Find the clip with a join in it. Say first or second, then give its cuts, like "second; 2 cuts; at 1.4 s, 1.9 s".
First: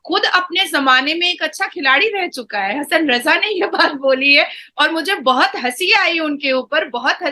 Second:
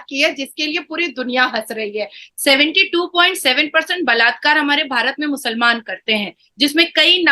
second; 1 cut; at 2.2 s